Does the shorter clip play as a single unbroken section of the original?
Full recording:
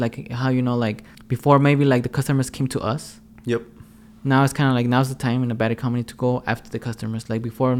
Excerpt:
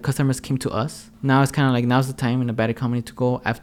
no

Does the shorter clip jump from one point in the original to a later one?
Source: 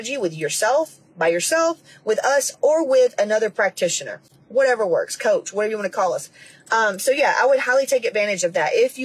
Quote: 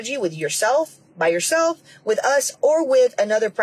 no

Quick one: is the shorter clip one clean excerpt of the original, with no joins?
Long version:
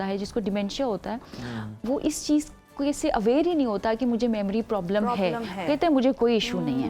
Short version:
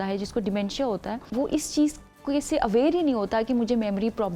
no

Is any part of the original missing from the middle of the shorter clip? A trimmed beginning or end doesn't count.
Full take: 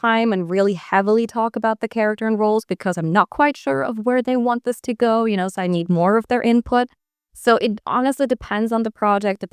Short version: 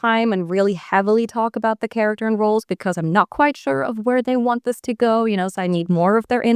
no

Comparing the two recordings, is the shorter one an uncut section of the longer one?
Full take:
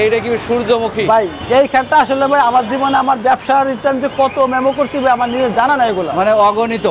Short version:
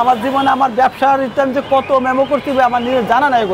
yes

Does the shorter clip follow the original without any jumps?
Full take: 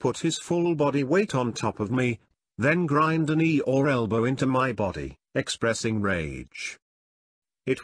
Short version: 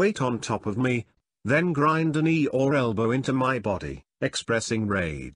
yes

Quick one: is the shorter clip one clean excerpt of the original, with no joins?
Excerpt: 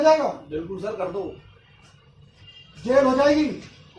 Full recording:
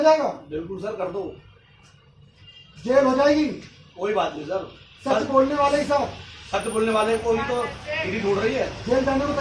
yes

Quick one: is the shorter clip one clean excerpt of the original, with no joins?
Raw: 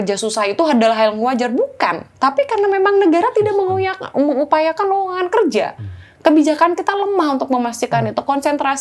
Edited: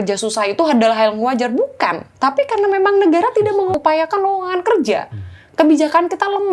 no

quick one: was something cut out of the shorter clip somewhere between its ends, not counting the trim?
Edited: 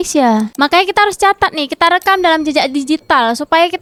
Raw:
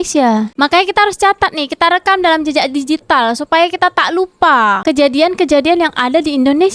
no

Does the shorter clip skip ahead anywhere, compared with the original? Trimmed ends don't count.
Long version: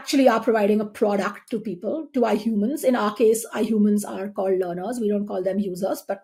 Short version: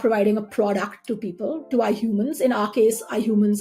no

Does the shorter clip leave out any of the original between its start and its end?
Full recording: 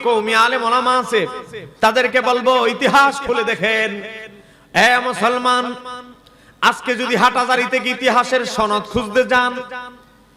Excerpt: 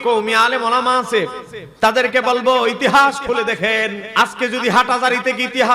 yes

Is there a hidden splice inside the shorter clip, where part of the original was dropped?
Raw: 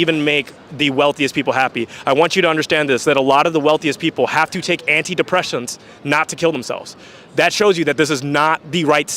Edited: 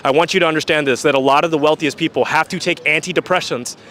no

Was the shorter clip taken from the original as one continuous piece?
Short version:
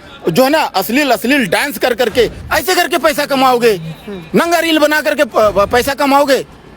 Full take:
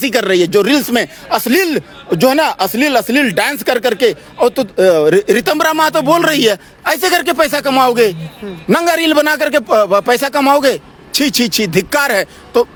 no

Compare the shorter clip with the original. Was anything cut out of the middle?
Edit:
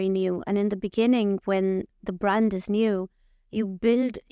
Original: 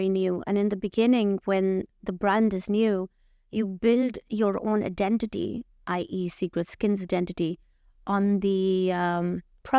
no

